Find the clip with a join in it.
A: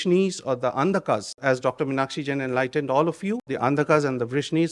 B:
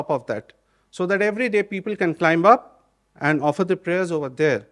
A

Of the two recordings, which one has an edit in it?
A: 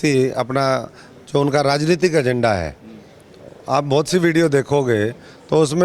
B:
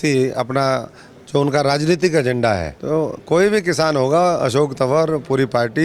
B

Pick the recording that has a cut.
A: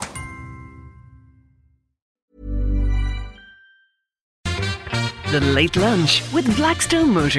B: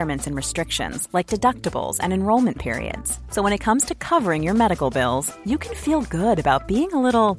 A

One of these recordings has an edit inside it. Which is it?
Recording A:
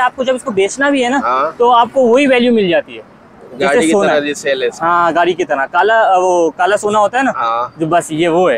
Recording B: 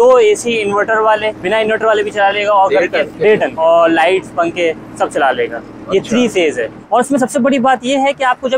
B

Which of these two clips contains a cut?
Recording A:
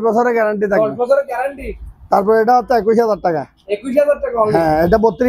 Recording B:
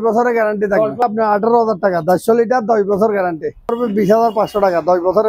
B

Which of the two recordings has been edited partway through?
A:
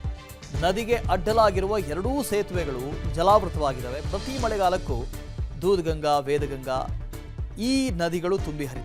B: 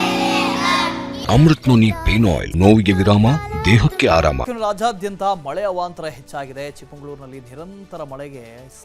B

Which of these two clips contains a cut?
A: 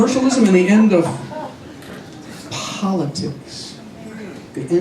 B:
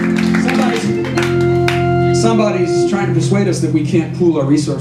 A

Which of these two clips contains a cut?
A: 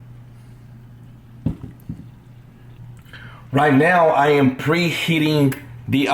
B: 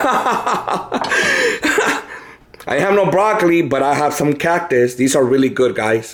A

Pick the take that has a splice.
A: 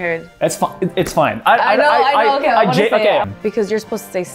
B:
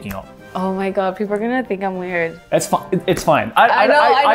A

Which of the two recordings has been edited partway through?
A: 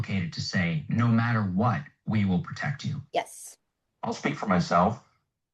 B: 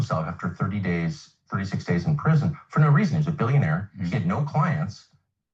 A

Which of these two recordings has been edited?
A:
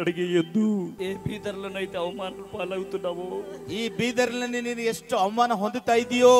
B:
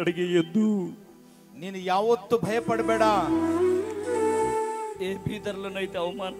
A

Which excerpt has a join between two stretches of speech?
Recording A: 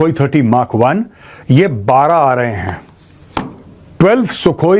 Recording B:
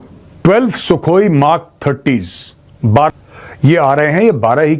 B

